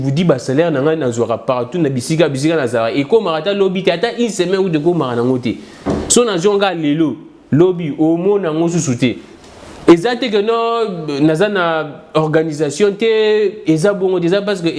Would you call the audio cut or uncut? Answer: uncut